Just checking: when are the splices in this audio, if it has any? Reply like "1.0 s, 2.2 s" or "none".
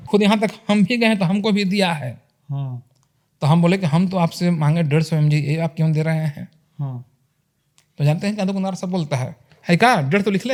none